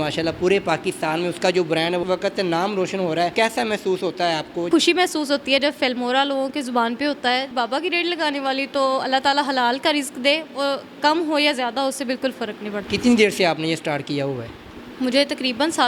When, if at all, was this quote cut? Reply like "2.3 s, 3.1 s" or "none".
2.0 s, 3.3 s, 4.7 s, 7.5 s, 12.9 s